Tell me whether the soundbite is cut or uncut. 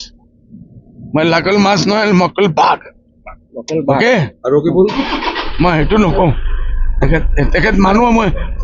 uncut